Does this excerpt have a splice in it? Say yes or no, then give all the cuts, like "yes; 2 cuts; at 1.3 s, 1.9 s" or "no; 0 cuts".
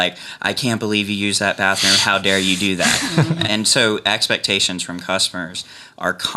yes; 1 cut; at 3.5 s